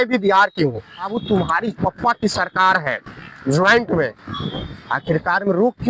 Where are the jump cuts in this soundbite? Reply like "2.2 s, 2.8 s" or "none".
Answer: 1.2 s